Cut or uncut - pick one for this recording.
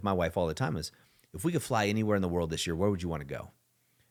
uncut